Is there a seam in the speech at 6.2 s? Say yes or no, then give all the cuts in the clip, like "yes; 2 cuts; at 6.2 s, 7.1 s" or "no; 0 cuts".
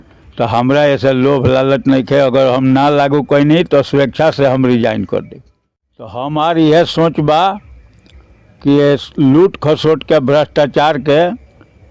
yes; 1 cut; at 6.2 s